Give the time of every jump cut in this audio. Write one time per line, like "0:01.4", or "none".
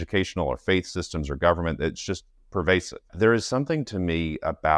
0:03.1